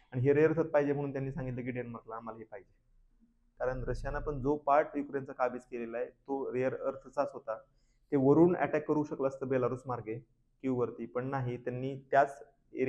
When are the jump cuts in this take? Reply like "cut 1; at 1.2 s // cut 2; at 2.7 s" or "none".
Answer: cut 1; at 3.4 s